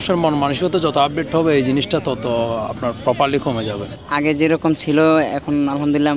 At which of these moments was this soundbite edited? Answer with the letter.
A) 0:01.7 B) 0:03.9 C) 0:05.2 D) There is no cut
B